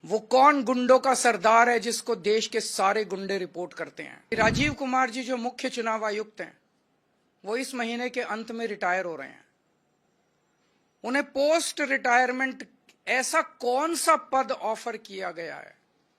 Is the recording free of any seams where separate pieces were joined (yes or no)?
no